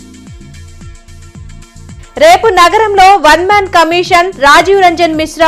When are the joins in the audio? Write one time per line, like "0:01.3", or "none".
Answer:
0:01.9